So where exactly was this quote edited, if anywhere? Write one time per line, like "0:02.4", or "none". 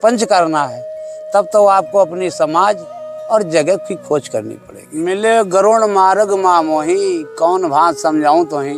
0:05.0

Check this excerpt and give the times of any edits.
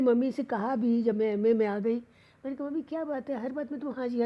none

